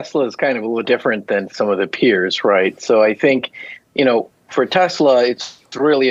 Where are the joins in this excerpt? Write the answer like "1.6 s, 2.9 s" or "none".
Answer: none